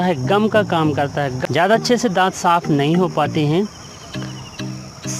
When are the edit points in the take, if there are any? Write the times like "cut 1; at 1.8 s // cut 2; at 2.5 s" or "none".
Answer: cut 1; at 1.4 s